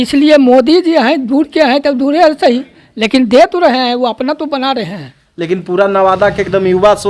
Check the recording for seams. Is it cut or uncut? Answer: uncut